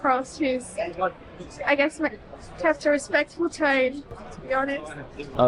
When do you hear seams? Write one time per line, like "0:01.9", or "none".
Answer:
none